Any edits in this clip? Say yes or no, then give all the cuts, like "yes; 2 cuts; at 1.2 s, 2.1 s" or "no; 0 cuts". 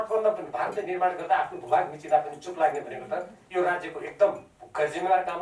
no; 0 cuts